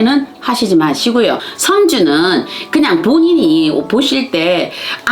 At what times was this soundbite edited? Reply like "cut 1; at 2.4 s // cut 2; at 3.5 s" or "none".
cut 1; at 1.5 s